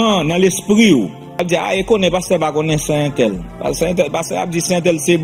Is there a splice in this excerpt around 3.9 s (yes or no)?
no